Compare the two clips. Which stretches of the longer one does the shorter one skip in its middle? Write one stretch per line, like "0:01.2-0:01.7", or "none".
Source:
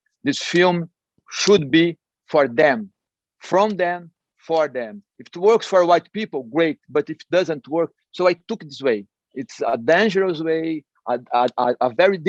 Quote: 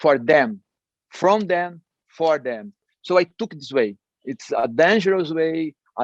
0:05.2-0:08.0

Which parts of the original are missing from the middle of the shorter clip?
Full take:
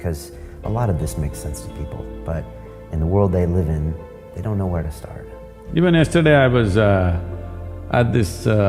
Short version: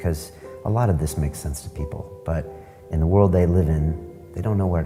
none

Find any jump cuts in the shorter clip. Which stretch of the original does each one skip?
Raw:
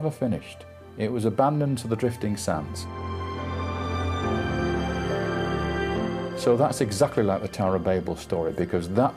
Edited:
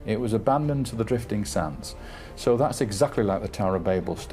0:03.2-0:06.3

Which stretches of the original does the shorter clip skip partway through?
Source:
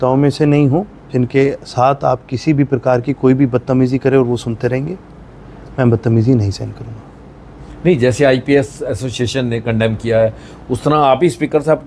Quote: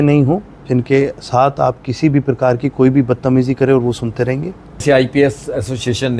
0:05.3-0:08.2

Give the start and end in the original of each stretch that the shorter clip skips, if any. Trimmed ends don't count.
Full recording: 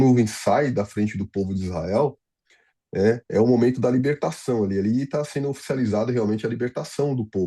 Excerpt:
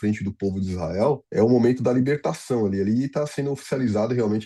0:02.2-0:03.2

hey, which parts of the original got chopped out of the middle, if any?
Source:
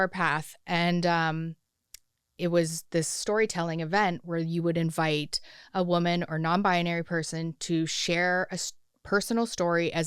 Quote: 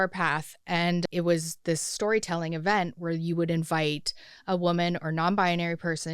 0:01.0-0:02.3

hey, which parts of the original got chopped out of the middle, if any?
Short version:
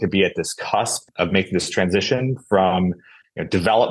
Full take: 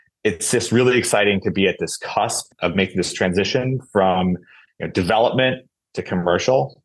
none

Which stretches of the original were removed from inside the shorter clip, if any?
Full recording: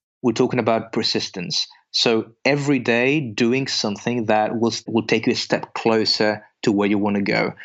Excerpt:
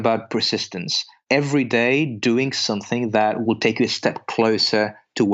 0:01.8-0:02.3
0:04.5-0:04.9

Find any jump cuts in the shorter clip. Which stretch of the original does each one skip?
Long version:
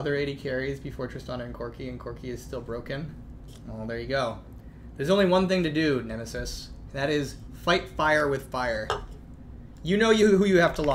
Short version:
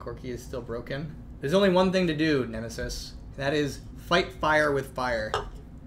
0:03.2-0:04.8

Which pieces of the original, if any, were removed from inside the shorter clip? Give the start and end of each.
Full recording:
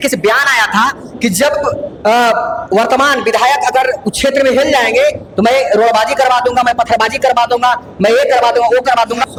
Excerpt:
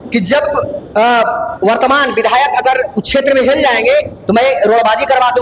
none

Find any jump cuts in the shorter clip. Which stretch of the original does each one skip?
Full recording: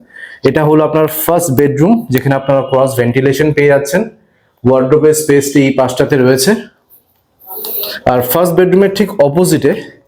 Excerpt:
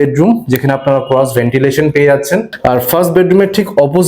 0:04.1-0:07.9

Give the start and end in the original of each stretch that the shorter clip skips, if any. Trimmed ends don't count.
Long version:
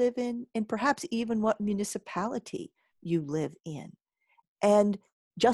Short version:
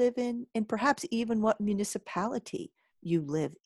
none

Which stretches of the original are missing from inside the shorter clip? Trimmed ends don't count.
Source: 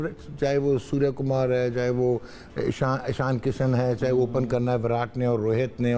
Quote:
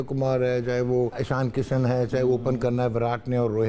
0:02.3-0:03.1

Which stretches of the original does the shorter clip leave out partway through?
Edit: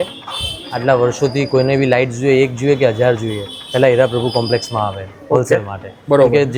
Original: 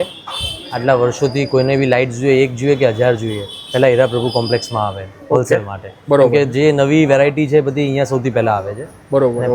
none

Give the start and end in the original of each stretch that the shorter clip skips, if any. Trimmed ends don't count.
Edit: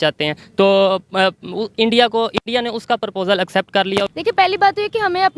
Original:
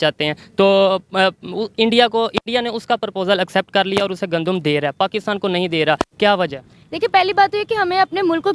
0:04.1-0:06.9

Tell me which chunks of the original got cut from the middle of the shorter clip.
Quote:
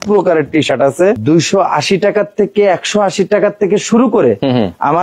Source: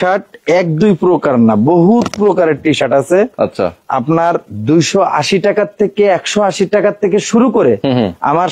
0:03.3-0:04.6

